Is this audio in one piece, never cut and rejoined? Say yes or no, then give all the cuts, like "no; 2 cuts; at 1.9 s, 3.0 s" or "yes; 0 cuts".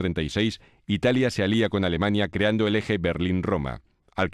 no; 1 cut; at 2.0 s